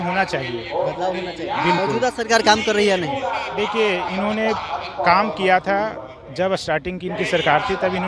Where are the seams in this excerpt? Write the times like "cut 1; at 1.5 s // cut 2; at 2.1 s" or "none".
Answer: none